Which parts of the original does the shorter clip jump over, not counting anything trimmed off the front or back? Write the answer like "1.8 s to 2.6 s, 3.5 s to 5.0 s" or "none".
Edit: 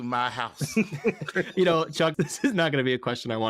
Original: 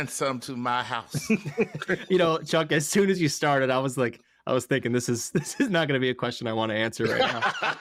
2.7 s to 5.3 s